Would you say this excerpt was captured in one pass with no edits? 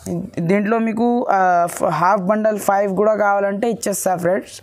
yes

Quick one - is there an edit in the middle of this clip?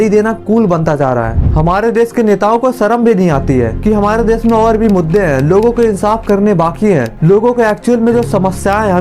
yes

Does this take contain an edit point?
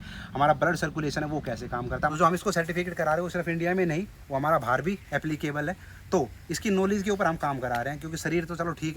yes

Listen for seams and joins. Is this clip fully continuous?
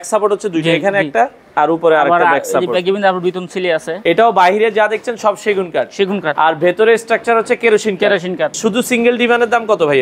no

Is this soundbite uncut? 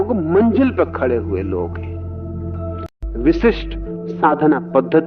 no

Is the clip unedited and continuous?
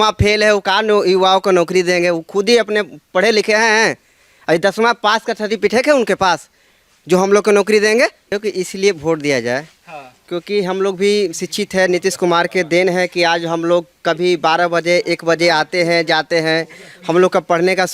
no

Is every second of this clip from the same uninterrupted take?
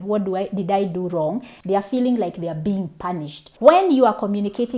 no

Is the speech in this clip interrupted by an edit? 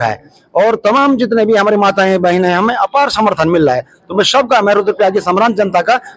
no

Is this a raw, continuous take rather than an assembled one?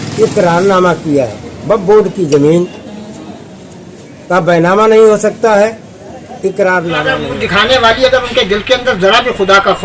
no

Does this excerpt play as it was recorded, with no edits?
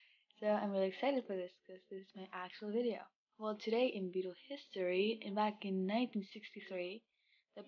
no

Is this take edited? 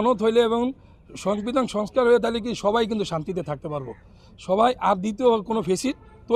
no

